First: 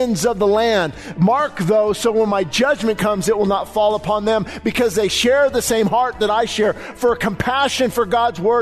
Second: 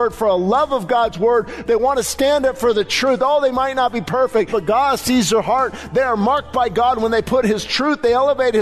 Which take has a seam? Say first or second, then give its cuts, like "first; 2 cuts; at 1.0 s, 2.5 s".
second; 1 cut; at 4.5 s